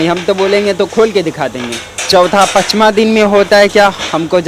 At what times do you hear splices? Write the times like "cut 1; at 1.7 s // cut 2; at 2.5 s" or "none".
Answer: cut 1; at 2.0 s